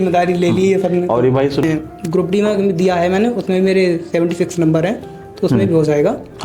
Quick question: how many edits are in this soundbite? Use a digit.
1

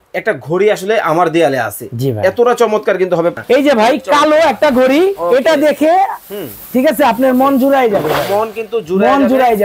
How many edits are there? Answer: 1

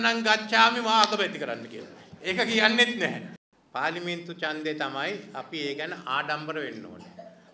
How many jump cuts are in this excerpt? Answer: 1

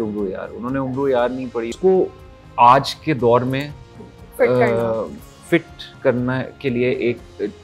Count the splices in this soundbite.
1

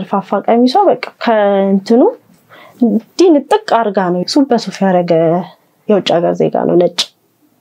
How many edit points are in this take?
1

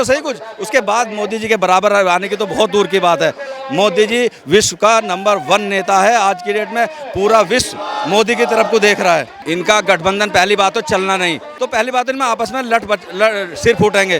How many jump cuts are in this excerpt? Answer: 2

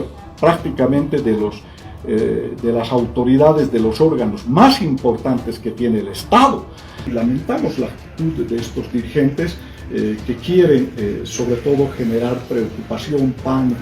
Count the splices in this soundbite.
1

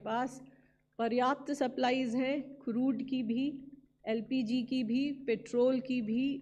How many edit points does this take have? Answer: 0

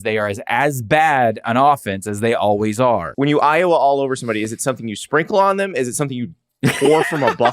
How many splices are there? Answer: 1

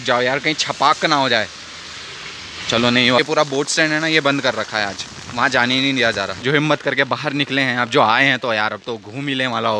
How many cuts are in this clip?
2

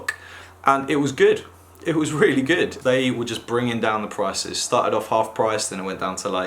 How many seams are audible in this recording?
1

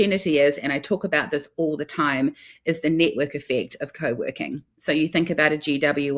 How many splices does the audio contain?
0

